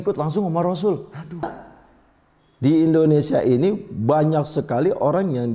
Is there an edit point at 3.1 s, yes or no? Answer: no